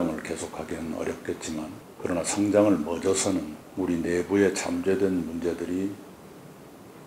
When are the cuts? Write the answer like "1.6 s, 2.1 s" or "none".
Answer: 1.8 s, 3.6 s